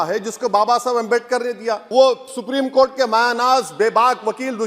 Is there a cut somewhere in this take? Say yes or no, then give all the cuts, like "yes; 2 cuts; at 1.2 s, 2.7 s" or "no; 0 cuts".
yes; 1 cut; at 1.8 s